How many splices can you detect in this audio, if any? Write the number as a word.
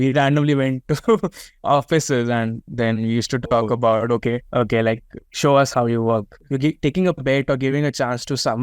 one